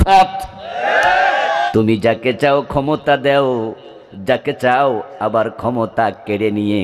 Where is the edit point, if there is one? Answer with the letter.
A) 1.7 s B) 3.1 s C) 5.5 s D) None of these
A